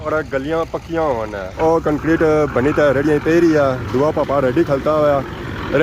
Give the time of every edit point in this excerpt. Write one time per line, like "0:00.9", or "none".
0:01.4

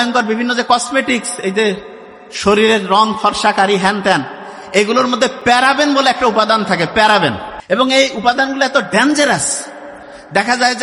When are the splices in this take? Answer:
0:07.5

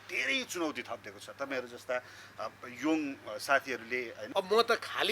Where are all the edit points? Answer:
0:04.2

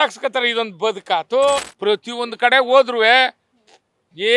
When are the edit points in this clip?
0:01.7

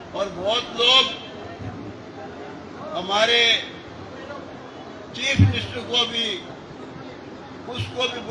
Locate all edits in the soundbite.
none

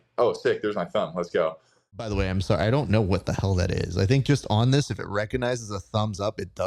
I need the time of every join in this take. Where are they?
0:02.0

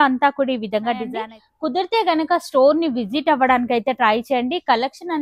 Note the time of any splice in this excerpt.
0:01.1

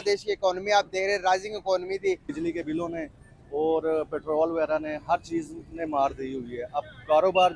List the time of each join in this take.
0:02.2

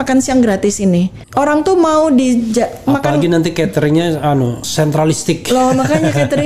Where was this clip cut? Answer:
0:01.2
0:04.6

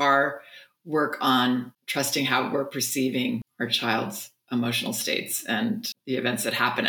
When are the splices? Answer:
0:01.8
0:03.5
0:05.9

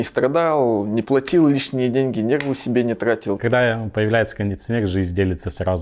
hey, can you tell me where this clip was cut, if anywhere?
0:03.4

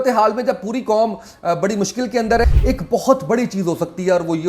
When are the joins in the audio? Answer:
0:02.4

